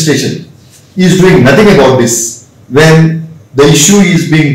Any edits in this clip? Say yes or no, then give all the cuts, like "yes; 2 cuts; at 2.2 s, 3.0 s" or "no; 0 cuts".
no; 0 cuts